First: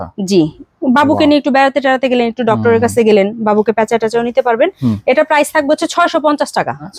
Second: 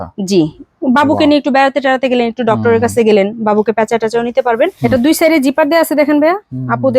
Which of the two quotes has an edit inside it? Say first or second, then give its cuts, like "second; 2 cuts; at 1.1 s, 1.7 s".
second; 1 cut; at 4.8 s